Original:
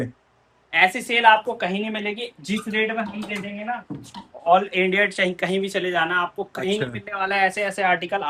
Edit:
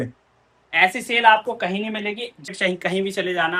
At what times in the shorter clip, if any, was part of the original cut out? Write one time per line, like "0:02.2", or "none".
0:02.5

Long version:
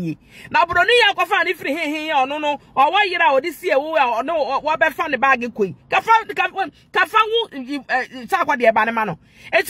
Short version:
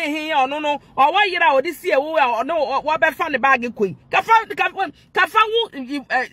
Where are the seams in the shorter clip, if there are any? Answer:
none

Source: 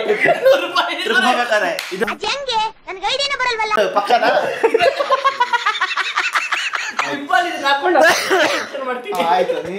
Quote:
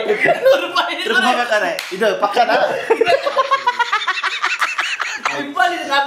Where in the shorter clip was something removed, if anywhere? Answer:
0:02.0

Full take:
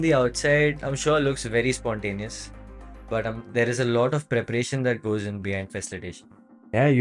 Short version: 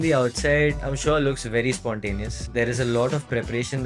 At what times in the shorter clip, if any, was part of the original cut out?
0:02.4

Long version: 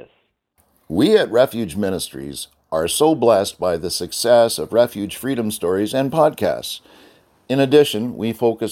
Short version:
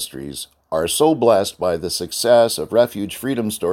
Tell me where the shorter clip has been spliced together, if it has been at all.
none

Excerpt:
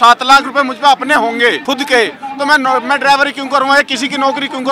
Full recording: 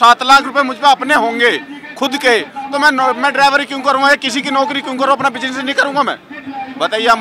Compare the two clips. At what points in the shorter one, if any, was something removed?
0:01.6

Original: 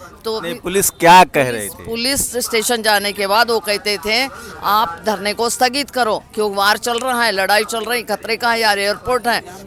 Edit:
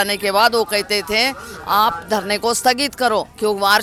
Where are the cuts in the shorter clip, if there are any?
none

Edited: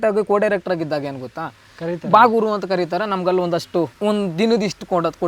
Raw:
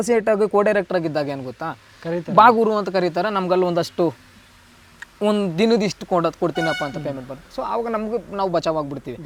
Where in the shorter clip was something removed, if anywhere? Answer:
0:03.9

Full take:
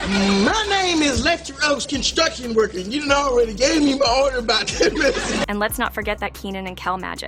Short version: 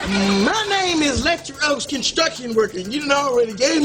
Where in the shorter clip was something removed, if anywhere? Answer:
none

